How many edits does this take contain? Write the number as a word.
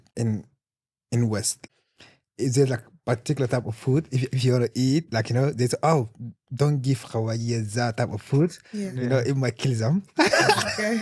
one